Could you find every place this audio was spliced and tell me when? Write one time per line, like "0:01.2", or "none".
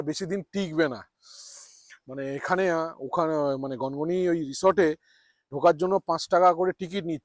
none